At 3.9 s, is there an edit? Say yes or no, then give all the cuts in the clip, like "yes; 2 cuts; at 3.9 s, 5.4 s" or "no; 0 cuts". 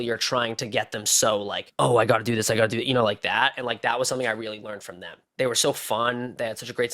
no; 2 cuts; at 1.6 s, 5.2 s